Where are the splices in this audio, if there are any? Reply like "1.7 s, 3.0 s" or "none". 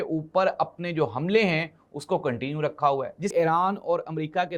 3.3 s